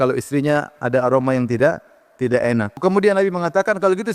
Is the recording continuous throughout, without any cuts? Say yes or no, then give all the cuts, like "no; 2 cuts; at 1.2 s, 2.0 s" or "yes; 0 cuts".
no; 1 cut; at 2.8 s